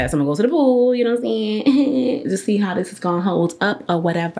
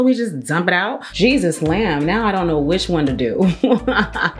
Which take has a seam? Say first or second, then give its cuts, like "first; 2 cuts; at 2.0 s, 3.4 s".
second; 1 cut; at 1.0 s